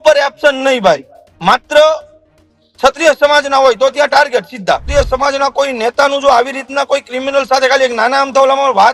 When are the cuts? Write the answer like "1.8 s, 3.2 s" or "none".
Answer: 4.9 s